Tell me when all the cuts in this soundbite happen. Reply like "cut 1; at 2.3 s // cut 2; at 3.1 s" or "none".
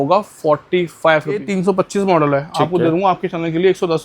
cut 1; at 1.5 s